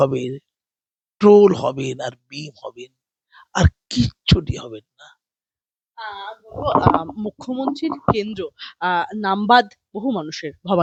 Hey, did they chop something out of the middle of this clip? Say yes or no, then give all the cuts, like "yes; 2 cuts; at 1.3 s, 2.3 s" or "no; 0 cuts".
no; 0 cuts